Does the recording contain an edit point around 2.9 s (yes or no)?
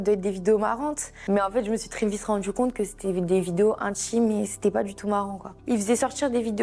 no